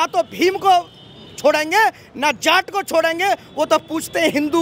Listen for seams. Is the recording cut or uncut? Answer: uncut